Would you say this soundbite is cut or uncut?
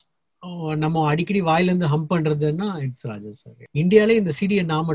cut